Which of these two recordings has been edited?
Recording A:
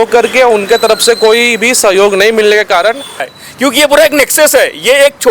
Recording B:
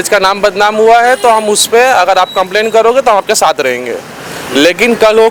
A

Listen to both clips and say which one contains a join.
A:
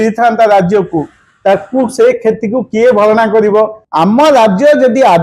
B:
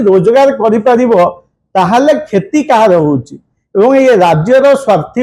A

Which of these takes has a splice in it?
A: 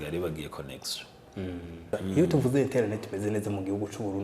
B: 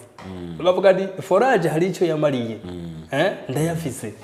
A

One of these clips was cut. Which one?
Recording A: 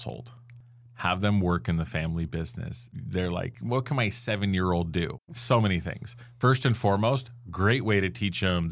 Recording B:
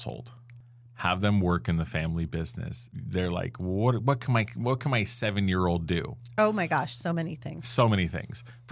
A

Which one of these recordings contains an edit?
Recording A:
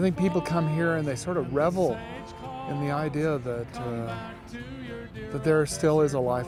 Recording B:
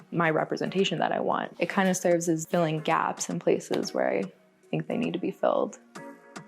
B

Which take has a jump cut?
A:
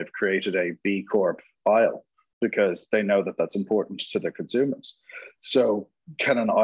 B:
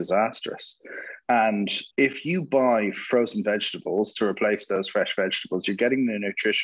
B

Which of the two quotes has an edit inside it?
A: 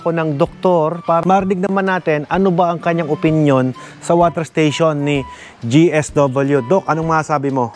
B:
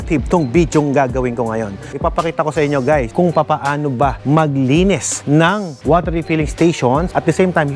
B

